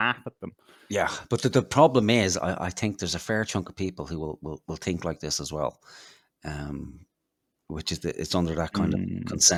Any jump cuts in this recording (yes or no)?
no